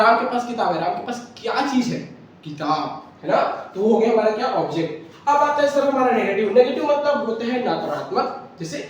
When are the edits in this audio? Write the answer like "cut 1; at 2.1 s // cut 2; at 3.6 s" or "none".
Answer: none